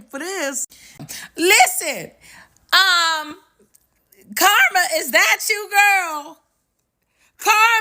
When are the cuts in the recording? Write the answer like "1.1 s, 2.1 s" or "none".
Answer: 1.0 s